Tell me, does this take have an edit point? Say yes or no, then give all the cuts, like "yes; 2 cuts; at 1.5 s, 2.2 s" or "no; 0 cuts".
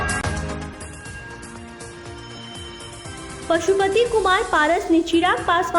yes; 1 cut; at 3.3 s